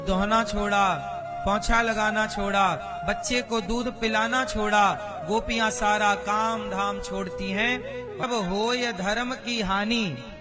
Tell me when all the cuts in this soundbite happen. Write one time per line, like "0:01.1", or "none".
0:08.2

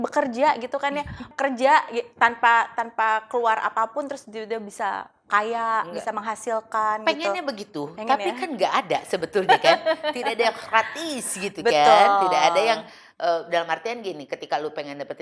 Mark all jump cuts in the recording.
0:01.2

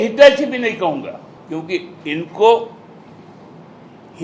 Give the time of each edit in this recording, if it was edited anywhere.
0:01.3

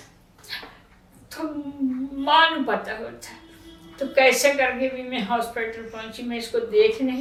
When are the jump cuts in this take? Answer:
none

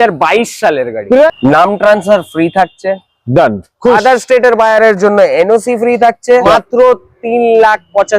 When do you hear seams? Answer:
0:01.3
0:06.5

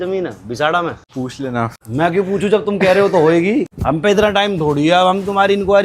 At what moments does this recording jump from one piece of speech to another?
0:01.4
0:03.8

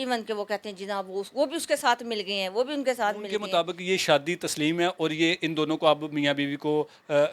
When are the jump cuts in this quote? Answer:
0:03.4

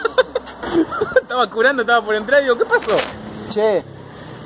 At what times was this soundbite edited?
0:03.1

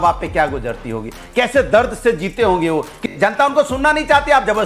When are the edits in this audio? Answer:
0:01.5
0:03.0

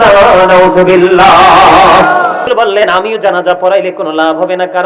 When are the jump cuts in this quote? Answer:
0:02.5

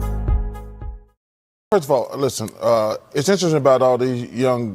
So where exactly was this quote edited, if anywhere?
0:01.7

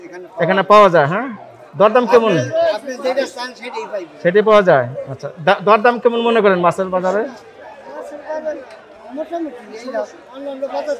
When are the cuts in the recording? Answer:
none

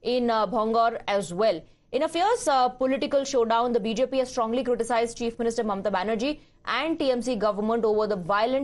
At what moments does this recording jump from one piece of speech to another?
none

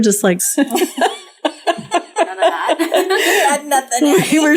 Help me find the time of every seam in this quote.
none

